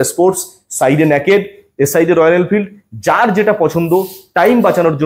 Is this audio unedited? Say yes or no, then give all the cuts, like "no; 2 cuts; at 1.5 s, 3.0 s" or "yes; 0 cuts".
yes; 0 cuts